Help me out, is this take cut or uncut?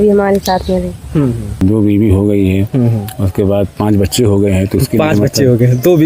cut